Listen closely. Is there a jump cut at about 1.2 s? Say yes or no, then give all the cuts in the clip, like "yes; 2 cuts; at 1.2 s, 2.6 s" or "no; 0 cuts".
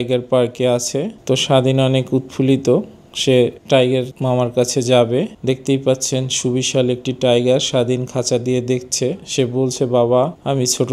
yes; 3 cuts; at 1.2 s, 5.4 s, 9.2 s